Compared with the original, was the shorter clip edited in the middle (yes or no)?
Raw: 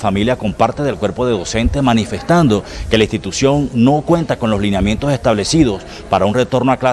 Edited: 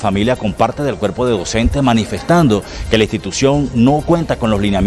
no